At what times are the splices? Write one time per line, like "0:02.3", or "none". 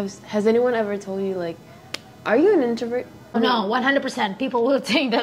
0:03.3

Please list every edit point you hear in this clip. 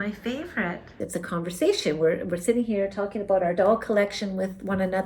0:01.0

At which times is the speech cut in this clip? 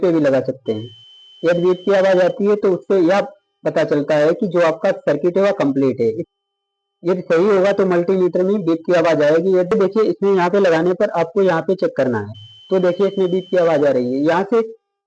0:06.2
0:09.7

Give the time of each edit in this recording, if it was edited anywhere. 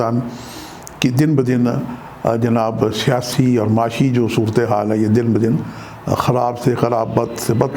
none

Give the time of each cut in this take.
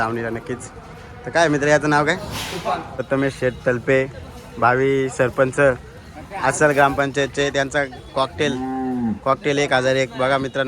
0:02.9

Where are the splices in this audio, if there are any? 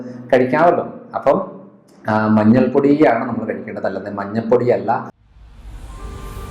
0:05.2

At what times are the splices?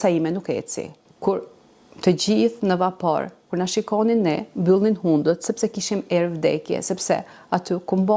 0:01.0

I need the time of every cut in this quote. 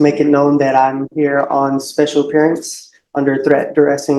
none

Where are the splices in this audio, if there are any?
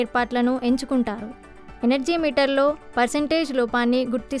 none

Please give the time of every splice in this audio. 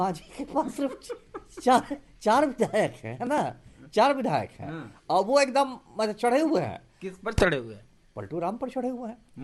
none

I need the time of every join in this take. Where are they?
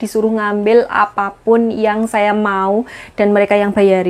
none

